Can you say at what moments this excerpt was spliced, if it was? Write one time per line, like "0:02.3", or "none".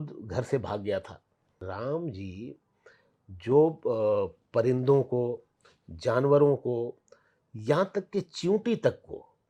0:01.7